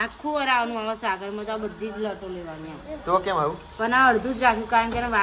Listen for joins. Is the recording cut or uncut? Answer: uncut